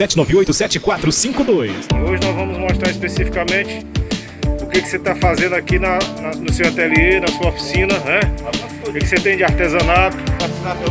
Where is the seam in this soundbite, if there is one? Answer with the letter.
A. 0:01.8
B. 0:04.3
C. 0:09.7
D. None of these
A